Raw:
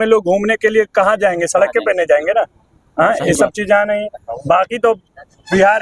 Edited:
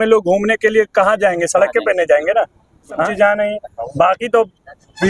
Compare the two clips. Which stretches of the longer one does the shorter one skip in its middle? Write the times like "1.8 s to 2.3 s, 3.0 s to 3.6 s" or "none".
3.1 s to 3.6 s